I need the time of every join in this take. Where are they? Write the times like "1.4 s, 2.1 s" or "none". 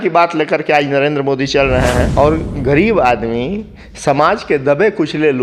2.1 s

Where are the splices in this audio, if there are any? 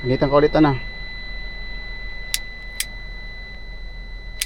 3.5 s

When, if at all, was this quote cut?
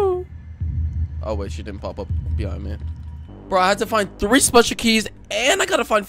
3.3 s

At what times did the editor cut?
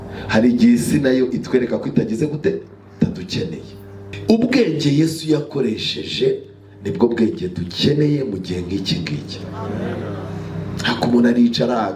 4.1 s

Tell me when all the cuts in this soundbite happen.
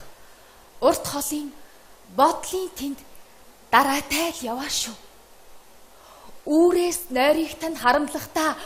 6.0 s

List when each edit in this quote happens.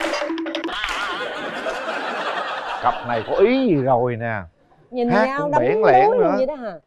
none

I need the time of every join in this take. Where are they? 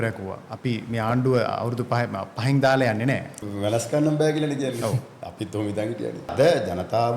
3.4 s, 6.3 s

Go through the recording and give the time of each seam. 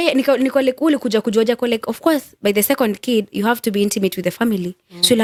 none

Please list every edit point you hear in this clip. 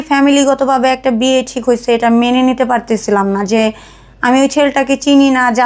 none

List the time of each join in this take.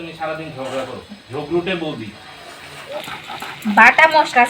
2.9 s

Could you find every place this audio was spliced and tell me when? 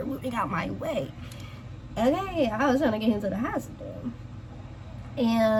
none

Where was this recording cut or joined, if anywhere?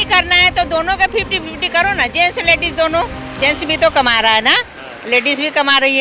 none

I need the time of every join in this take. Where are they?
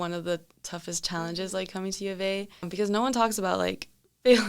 2.7 s

